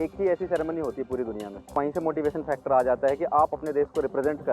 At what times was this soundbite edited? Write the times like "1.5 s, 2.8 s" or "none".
1.8 s, 3.5 s

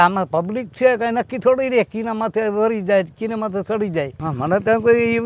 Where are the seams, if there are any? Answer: 4.2 s

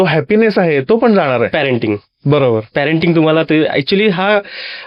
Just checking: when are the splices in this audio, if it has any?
none

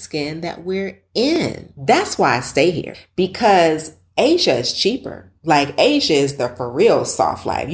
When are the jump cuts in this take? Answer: 1.7 s, 2.9 s

